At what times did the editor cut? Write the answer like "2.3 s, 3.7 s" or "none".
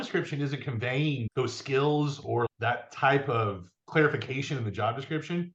none